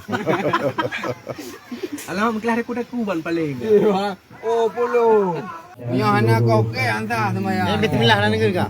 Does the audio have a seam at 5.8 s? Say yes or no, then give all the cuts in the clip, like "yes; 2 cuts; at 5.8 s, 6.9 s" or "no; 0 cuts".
yes; 1 cut; at 5.8 s